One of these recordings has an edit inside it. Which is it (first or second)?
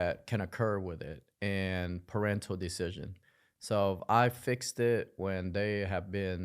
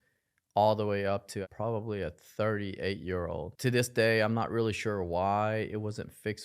second